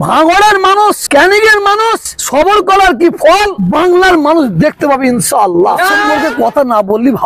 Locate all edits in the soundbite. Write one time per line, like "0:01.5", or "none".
0:01.0
0:02.1
0:03.6
0:06.1